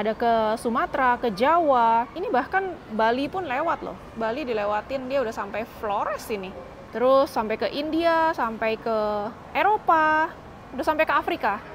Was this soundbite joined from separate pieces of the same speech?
yes; 3 cuts; at 2.1 s, 6.7 s, 9.4 s

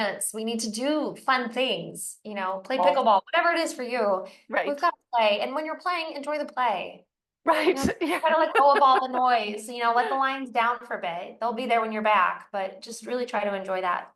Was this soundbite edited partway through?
no; 0 cuts

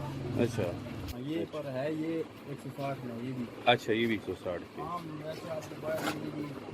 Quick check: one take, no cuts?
no; 1 cut; at 1.1 s

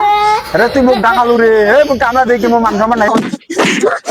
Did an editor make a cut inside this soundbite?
yes; 1 cut; at 3.1 s

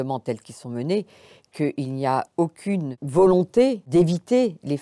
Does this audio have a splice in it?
yes; 2 cuts; at 3.0 s, 3.8 s

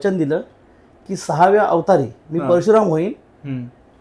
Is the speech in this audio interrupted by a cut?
no; 0 cuts

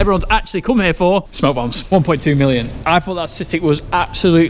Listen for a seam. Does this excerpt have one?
yes; 2 cuts; at 1.8 s, 2.8 s

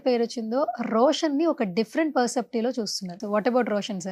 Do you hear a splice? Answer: yes; 1 cut; at 3.2 s

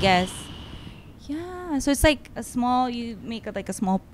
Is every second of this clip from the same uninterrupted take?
yes; 0 cuts

